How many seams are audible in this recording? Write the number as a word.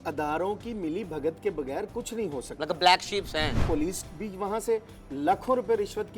one